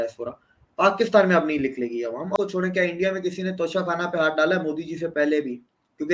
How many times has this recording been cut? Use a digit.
1